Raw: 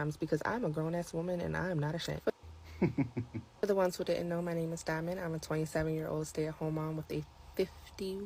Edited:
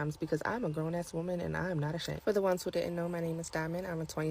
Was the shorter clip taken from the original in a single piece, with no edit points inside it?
no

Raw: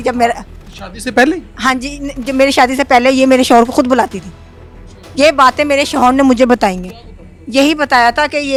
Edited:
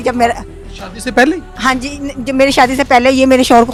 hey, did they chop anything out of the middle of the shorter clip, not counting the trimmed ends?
no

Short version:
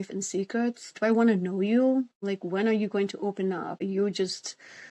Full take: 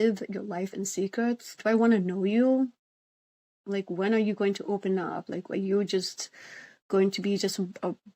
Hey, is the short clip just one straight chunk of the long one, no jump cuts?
no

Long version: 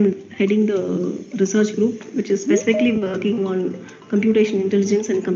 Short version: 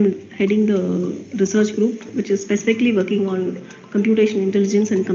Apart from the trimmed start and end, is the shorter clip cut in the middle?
yes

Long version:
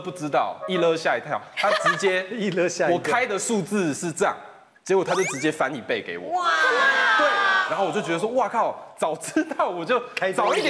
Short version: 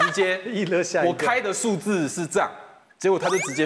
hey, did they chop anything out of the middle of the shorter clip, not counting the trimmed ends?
no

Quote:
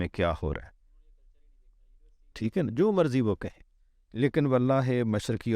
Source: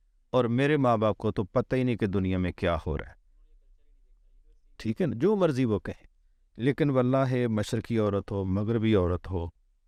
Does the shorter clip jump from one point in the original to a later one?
no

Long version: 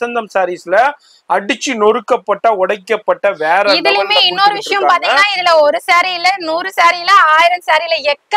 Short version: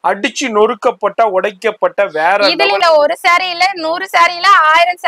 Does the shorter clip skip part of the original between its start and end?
yes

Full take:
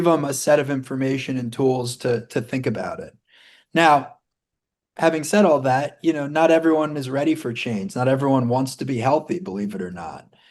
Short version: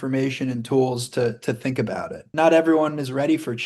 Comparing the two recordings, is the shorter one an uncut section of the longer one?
no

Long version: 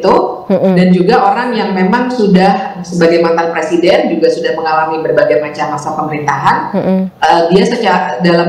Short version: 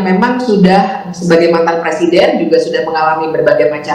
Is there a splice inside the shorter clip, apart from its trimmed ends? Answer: no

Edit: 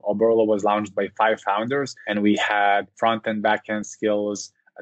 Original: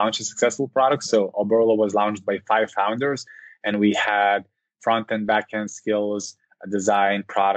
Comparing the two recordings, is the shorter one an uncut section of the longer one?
no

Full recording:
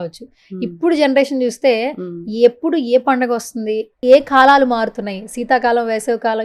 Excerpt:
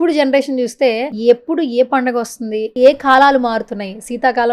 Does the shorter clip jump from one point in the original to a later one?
yes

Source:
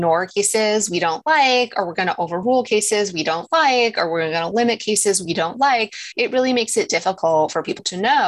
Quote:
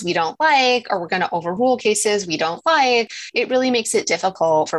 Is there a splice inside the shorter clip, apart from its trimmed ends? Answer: yes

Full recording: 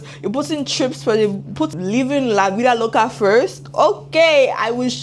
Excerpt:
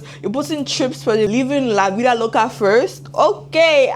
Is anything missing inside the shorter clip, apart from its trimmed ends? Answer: yes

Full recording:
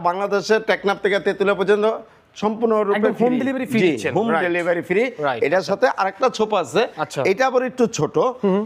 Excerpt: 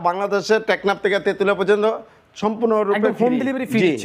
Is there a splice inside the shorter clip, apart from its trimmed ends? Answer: no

